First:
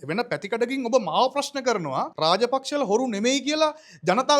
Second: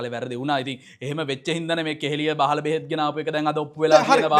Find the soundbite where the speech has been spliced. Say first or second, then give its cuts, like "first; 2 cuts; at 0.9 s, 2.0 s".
first; 1 cut; at 2.1 s